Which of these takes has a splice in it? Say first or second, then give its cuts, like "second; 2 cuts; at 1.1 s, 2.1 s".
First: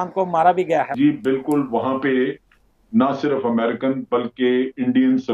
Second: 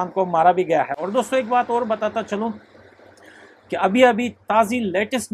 first; 1 cut; at 0.9 s